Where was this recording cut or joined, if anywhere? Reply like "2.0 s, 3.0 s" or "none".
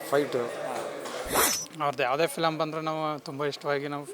1.5 s